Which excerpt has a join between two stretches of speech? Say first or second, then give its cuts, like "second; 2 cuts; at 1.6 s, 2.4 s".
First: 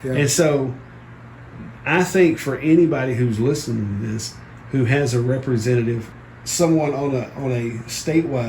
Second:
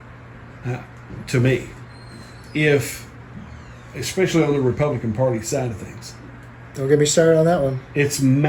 first; 1 cut; at 6.1 s